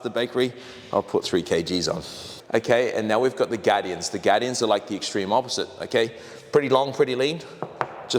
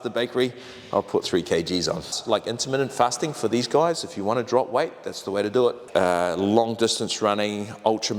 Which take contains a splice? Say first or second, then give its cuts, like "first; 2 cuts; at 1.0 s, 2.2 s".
second; 2 cuts; at 2.1 s, 5.8 s